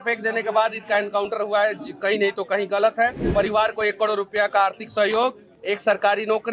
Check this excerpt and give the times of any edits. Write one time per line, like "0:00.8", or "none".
0:03.2